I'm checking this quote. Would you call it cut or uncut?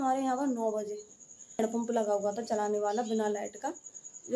cut